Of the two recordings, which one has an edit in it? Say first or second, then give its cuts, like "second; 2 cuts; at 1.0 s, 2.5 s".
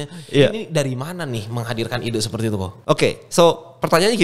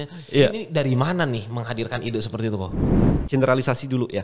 second; 1 cut; at 2.9 s